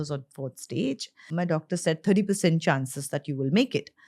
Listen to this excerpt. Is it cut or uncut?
cut